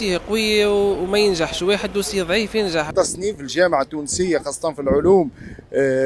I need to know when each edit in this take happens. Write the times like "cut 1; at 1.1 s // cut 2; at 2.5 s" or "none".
cut 1; at 2.9 s

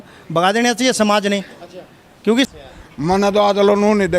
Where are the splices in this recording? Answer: cut 1; at 2.5 s

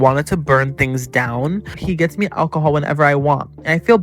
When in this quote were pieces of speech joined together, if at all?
cut 1; at 1.7 s

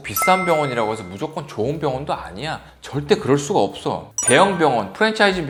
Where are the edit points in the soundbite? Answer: none

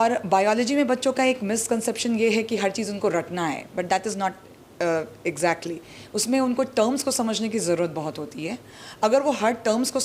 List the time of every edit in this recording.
none

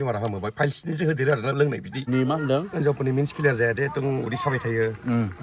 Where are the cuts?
cut 1; at 2.0 s

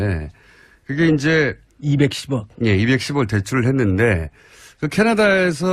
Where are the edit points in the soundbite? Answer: cut 1; at 4.4 s

